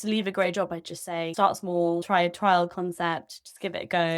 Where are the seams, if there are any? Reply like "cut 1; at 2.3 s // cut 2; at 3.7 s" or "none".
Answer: cut 1; at 1.3 s // cut 2; at 2.0 s